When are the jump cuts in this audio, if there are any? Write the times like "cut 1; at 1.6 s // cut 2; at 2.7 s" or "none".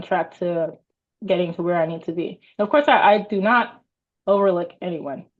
none